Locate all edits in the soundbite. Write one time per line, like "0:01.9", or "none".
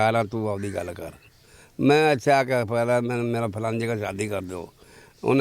none